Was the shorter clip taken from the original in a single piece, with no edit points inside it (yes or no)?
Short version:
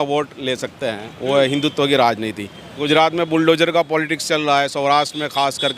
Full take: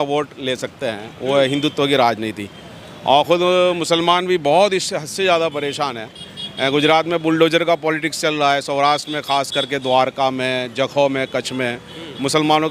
no